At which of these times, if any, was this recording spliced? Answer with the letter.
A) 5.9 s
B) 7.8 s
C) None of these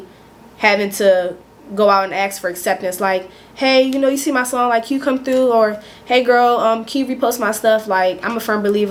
C